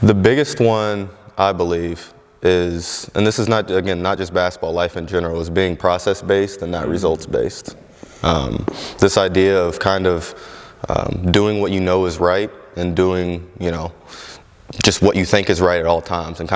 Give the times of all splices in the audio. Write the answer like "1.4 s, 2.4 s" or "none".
none